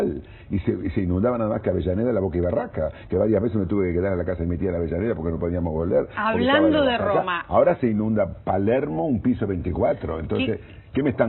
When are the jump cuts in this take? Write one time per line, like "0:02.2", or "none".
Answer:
0:08.5